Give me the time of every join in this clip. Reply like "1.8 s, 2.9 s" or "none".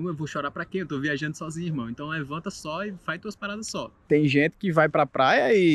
4.1 s